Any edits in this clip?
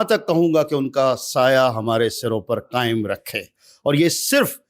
no; 0 cuts

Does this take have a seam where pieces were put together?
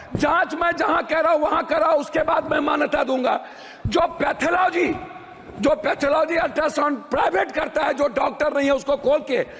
no; 0 cuts

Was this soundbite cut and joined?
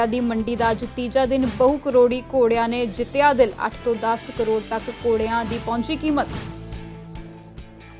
no; 0 cuts

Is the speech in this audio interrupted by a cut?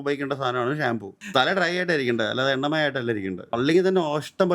yes; 2 cuts; at 1.2 s, 3.5 s

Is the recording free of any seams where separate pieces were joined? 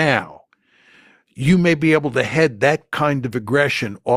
yes; 0 cuts

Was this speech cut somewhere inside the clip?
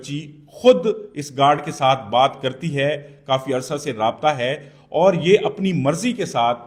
no; 0 cuts

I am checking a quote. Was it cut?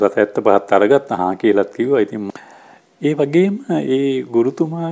yes; 1 cut; at 2.3 s

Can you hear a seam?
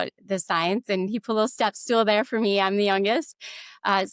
no; 0 cuts

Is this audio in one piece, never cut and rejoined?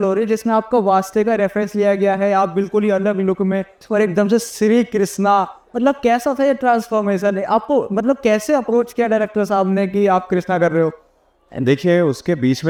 yes; 0 cuts

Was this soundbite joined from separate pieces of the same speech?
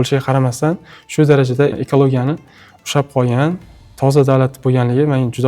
yes; 1 cut; at 1.7 s

